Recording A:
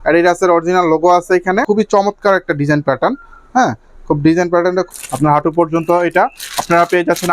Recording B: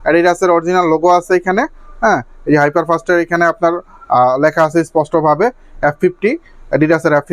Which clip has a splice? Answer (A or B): A